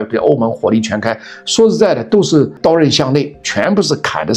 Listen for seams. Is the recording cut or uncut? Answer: cut